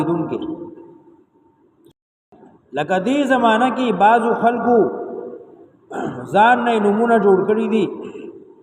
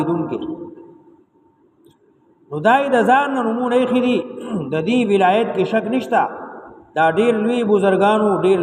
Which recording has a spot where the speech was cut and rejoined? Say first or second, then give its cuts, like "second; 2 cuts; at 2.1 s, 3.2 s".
first; 1 cut; at 2.3 s